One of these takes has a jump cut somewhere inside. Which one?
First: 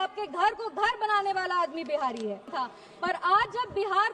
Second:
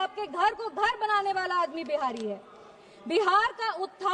first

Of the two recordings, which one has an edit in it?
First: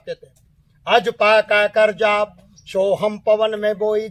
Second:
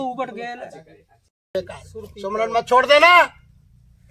second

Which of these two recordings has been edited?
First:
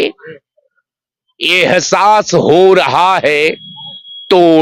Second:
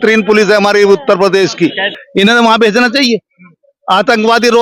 second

